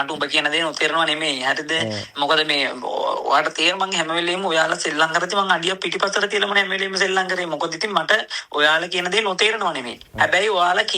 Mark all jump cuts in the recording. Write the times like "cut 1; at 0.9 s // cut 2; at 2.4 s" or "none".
none

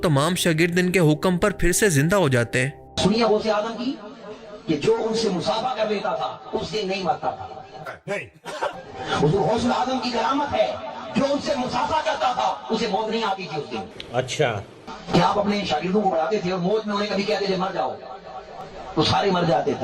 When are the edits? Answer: none

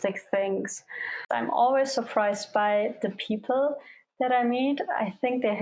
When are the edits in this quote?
cut 1; at 1.3 s

